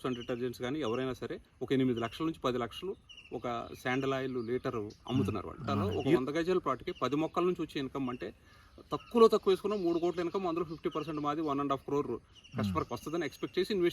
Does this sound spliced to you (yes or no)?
yes